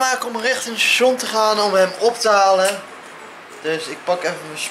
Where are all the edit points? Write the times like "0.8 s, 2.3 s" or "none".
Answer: none